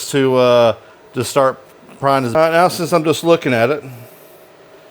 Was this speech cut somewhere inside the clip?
yes; 1 cut; at 2.3 s

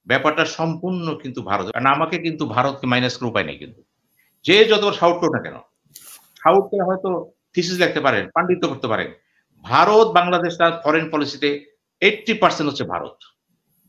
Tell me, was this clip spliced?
yes; 1 cut; at 1.7 s

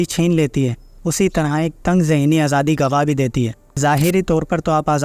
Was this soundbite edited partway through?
yes; 1 cut; at 3.6 s

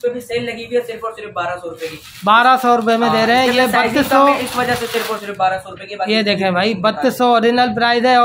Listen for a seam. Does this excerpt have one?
no; 0 cuts

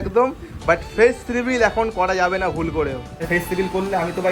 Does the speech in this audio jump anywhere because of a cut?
yes; 1 cut; at 3.2 s

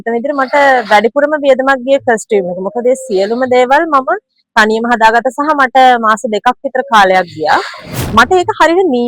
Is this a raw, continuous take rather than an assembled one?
no; 1 cut; at 8.0 s

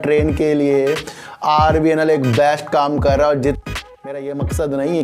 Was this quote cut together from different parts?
yes; 1 cut; at 3.6 s

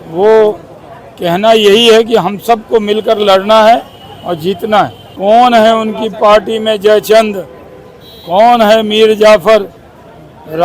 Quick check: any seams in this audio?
yes; 1 cut; at 5.0 s

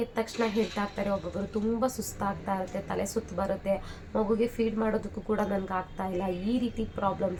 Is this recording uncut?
yes; 0 cuts

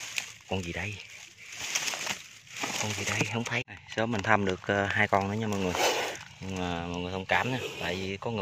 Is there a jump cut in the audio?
yes; 1 cut; at 3.8 s

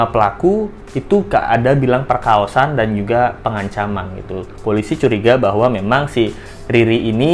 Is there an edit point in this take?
no; 0 cuts

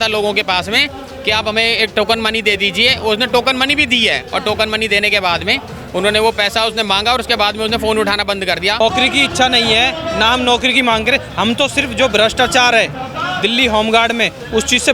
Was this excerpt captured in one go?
no; 1 cut; at 8.8 s

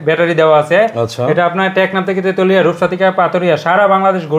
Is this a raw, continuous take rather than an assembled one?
yes; 0 cuts

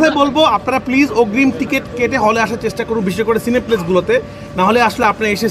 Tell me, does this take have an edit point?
no; 0 cuts

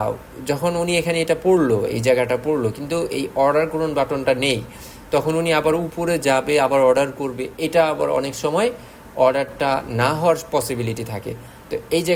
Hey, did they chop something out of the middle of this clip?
no; 0 cuts

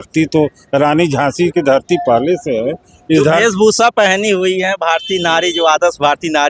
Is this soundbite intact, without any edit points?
yes; 0 cuts

